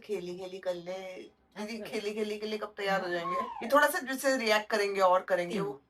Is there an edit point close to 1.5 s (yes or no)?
no